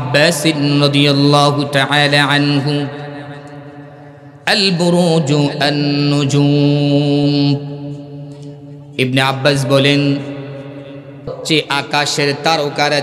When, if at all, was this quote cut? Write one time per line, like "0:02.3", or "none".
0:08.8
0:11.4